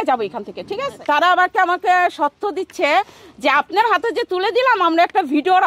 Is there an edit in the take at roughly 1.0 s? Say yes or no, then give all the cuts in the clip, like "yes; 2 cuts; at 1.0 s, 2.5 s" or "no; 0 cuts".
yes; 1 cut; at 1.0 s